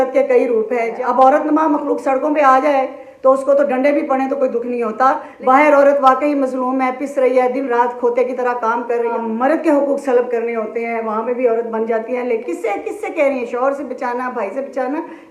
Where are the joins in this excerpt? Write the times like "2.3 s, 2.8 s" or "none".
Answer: 0.9 s, 5.3 s, 9.1 s, 12.4 s